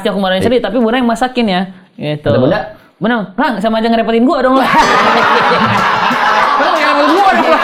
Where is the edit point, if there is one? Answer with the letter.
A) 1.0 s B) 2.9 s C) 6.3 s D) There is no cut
D